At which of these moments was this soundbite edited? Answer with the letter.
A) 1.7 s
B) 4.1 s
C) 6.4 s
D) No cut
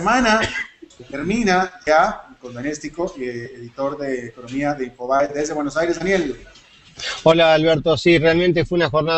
C